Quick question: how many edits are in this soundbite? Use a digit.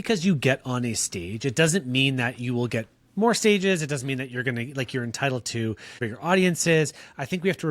1